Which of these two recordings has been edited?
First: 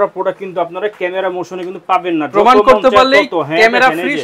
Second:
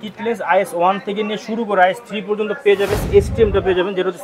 second; 1 cut; at 3.0 s

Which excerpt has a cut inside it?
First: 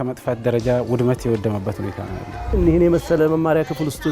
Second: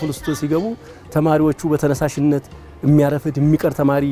first; 1 cut; at 2.3 s

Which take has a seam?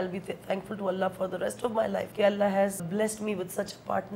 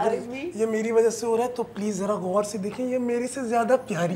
first; 2 cuts; at 2.1 s, 2.9 s

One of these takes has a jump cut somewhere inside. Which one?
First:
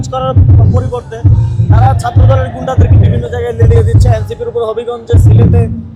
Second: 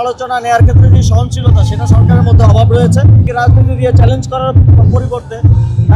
second; 1 cut; at 3.2 s

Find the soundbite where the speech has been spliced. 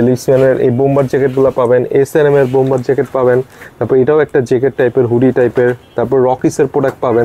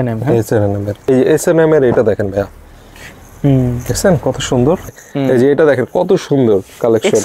second; 2 cuts; at 1.1 s, 5.0 s

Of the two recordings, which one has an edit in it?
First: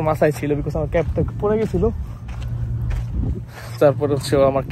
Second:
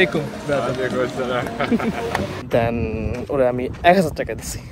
second; 1 cut; at 2.4 s

